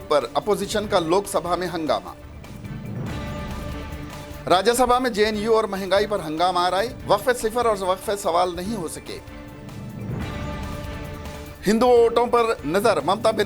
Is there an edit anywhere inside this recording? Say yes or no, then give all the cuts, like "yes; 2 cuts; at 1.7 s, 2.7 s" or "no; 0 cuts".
yes; 2 cuts; at 3.1 s, 4.3 s